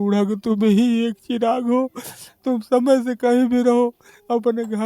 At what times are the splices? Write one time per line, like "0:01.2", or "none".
none